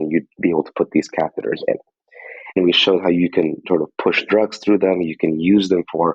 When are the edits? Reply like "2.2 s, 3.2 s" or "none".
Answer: 2.6 s